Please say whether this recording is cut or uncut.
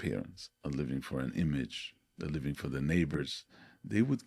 uncut